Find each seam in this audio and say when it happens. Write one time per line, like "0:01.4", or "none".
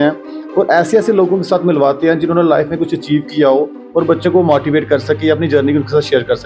none